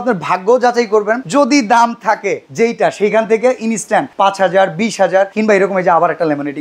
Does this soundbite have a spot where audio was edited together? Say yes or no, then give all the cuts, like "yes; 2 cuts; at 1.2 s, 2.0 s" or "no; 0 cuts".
yes; 4 cuts; at 1.2 s, 2.4 s, 4.1 s, 5.3 s